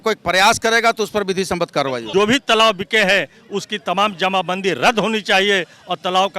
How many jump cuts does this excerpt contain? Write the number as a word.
one